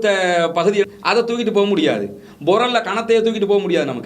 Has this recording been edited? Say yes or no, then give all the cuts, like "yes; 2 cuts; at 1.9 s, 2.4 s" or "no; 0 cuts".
yes; 1 cut; at 0.9 s